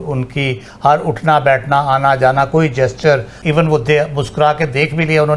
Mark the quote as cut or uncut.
cut